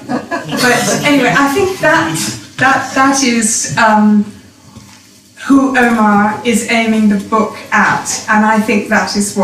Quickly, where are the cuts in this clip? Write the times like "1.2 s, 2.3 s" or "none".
none